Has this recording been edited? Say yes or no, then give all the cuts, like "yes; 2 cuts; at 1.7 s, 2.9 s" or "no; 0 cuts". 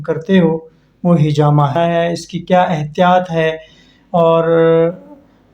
yes; 1 cut; at 1.7 s